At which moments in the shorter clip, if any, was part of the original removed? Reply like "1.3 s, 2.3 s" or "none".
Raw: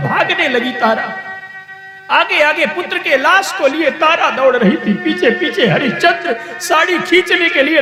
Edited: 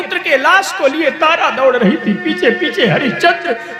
none